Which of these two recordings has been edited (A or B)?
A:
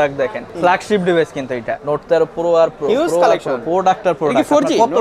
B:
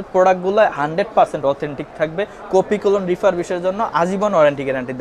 A